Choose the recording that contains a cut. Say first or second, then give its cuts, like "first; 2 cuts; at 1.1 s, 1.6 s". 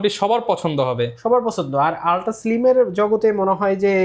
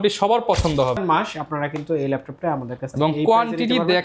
second; 1 cut; at 1.0 s